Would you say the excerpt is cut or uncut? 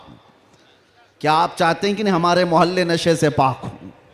uncut